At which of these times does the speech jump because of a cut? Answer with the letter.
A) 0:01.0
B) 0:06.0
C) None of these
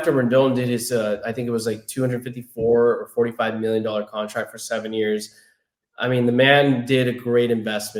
C